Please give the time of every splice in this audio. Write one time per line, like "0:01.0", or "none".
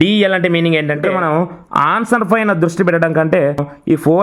0:01.5
0:03.5